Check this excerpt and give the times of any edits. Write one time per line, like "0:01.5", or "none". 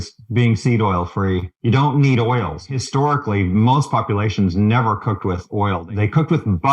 0:01.5
0:02.6
0:05.8

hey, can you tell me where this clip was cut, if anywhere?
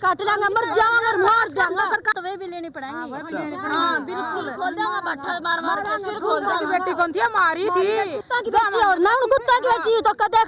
0:02.1
0:08.2

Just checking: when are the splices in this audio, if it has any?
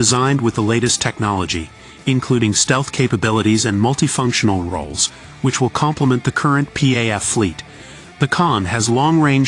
none

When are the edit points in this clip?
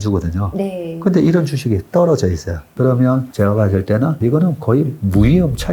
none

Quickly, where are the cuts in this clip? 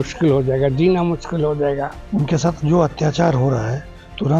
0:01.9

